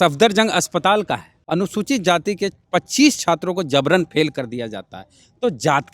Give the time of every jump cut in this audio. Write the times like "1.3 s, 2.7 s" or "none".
1.3 s